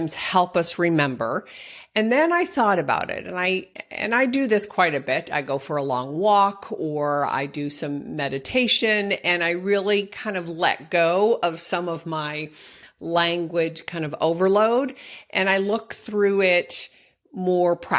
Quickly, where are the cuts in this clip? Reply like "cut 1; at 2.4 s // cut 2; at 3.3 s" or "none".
none